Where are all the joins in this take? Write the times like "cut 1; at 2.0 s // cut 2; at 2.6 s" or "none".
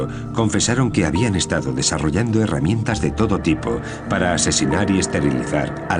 none